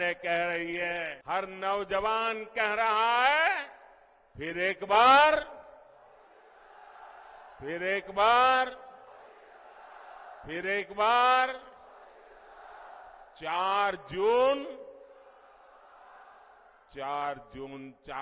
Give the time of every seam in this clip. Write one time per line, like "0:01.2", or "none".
0:01.1